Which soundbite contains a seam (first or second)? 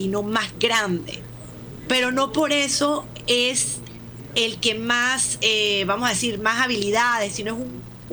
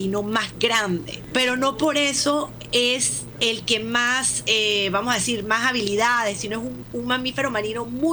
second